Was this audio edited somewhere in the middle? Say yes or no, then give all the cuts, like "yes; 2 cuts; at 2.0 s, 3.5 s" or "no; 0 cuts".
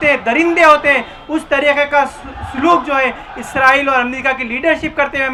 no; 0 cuts